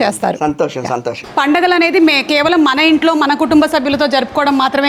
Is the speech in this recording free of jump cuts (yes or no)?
no